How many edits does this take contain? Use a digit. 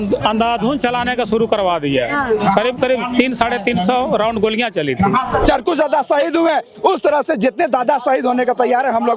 1